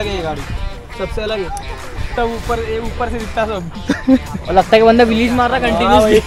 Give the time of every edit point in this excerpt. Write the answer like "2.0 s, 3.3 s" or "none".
2.1 s